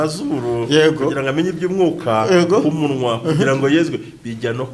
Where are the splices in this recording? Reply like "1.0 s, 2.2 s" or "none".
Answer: none